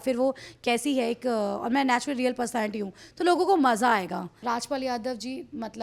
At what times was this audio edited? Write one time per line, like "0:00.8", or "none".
0:04.3

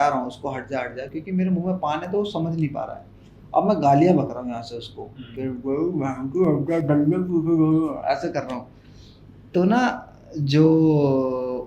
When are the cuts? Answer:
none

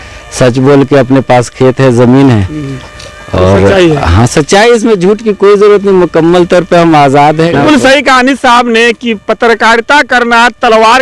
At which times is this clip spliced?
0:07.6

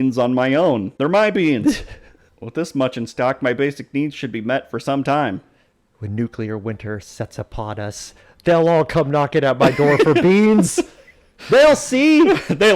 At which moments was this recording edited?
0:01.0

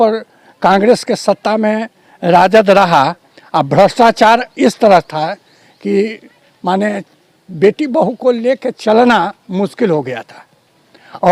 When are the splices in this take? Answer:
none

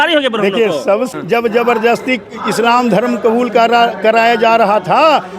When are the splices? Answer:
0:01.1

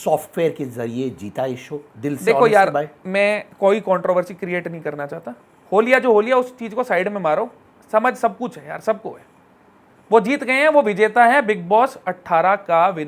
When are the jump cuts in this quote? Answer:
none

